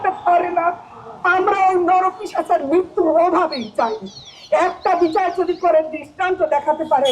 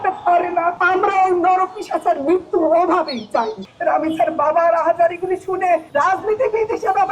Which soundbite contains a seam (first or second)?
second